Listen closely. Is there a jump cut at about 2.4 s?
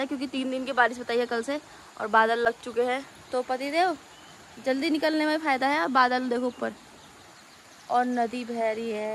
no; 0 cuts

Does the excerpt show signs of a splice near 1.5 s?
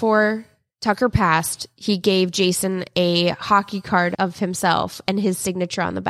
no; 1 cut; at 4.1 s

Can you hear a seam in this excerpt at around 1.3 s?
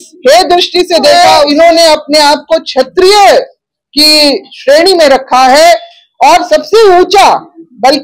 yes; 1 cut; at 1.3 s

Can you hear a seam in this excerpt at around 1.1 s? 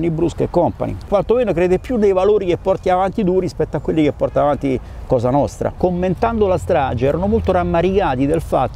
yes; 2 cuts; at 1.1 s, 5.8 s

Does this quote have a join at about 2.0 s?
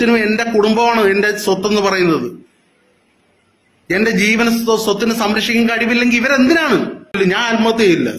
no; 1 cut; at 7.2 s

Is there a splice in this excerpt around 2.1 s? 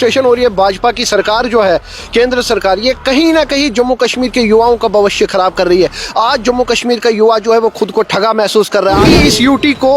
no; 1 cut; at 9.0 s

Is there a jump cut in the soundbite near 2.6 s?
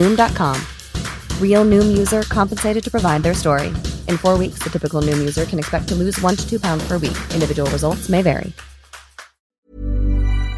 no; 1 cut; at 9.6 s

